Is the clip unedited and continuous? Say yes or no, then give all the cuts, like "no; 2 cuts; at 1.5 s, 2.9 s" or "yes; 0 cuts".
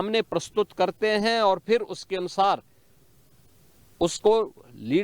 yes; 0 cuts